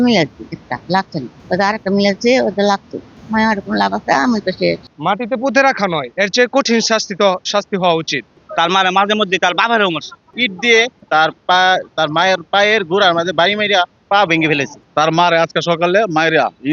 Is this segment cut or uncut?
cut